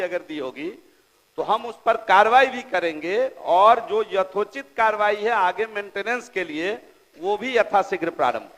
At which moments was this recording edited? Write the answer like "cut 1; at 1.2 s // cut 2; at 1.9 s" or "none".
none